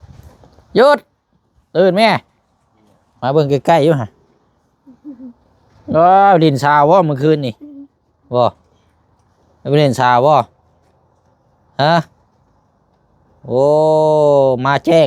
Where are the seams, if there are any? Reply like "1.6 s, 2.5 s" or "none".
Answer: none